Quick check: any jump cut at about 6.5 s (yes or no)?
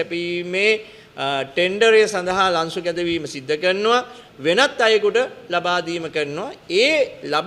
no